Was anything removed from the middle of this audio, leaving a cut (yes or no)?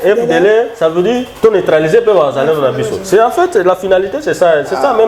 no